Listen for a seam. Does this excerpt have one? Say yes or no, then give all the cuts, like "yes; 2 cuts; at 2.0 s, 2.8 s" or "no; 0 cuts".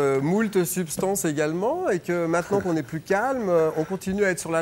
no; 0 cuts